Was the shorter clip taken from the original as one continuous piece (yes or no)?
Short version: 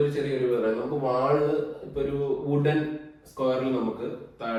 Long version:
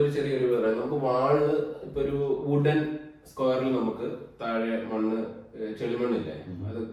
yes